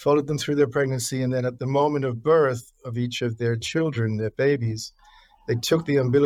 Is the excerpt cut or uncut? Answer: uncut